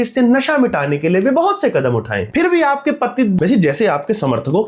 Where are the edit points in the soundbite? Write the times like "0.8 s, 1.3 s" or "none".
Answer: 2.2 s, 3.4 s